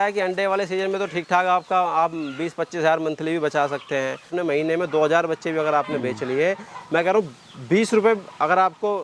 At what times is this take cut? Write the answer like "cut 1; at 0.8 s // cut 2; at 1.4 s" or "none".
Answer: cut 1; at 4.3 s